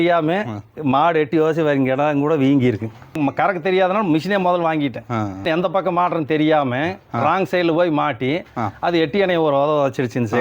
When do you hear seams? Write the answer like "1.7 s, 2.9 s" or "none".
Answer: 3.2 s, 5.4 s

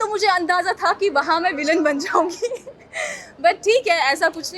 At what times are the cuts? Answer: none

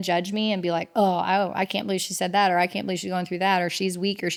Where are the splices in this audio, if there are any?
none

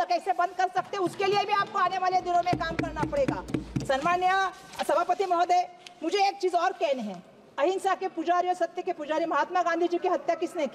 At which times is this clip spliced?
none

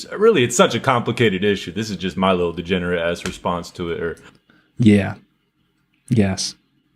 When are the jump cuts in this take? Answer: none

